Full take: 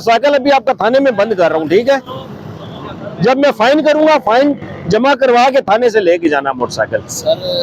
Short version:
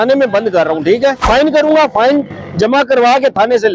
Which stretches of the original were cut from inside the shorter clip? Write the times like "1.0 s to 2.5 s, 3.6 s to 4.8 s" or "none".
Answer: 2.1 s to 3.6 s